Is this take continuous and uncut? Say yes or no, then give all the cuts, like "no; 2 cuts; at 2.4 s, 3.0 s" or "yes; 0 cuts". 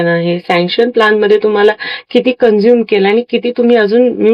yes; 0 cuts